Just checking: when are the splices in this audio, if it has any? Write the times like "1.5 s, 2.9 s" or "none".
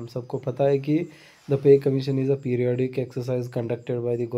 none

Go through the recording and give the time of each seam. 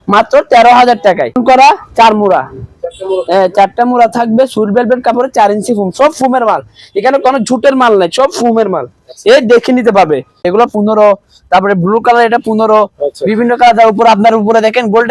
1.4 s, 10.4 s

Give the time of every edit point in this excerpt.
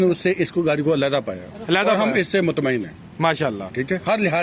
none

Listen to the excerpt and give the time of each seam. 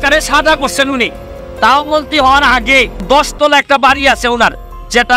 3.0 s

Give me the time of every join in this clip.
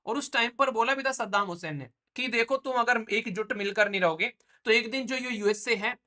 none

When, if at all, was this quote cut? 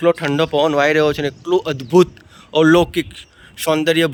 none

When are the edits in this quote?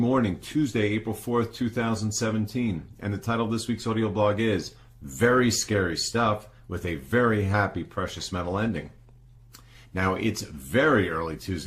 none

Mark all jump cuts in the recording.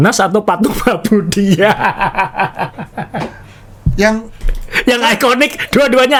none

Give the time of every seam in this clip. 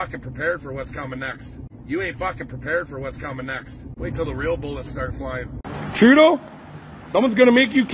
1.7 s, 3.8 s

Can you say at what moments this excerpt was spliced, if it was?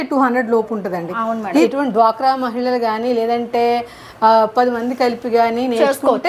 1.6 s

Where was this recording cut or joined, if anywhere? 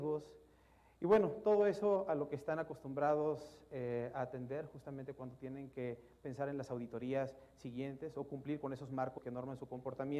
none

